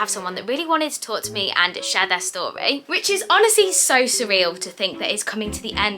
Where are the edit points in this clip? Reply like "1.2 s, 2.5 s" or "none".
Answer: 2.8 s